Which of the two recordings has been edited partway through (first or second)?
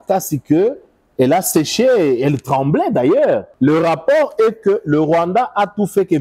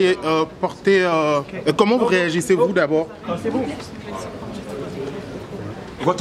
first